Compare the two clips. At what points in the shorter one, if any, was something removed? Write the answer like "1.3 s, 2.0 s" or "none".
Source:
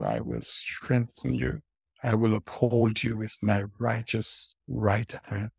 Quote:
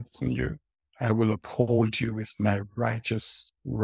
none